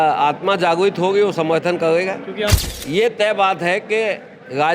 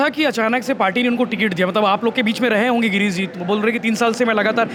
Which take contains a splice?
first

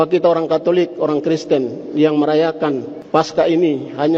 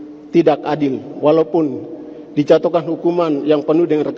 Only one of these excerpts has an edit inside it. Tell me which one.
first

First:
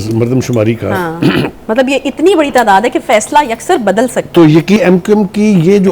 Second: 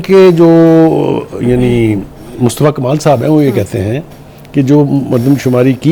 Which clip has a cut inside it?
first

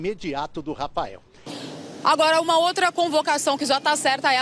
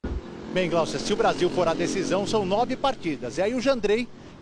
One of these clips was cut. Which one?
first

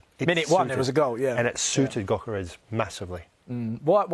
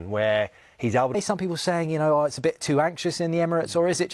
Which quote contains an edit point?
second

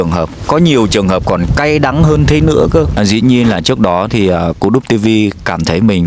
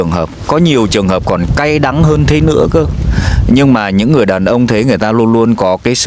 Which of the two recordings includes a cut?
first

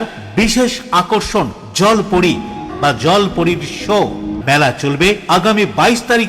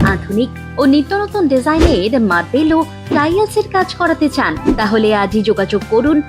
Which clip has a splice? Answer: first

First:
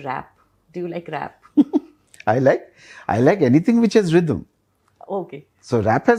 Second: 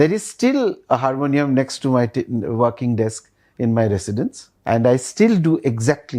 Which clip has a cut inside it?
second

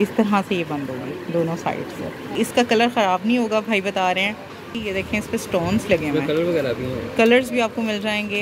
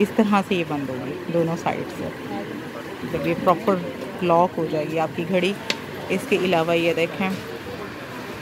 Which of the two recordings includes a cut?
first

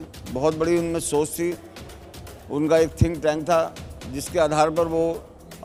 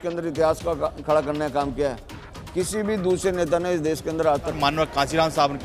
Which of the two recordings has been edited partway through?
second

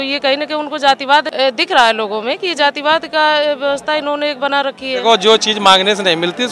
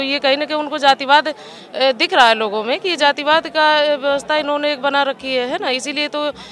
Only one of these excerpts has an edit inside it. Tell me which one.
first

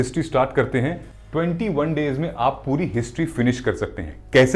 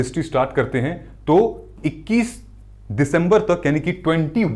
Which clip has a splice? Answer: first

